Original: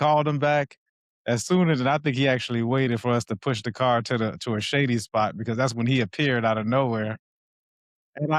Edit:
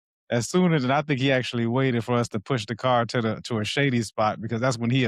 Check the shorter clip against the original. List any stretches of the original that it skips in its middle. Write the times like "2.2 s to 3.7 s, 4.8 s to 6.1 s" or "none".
none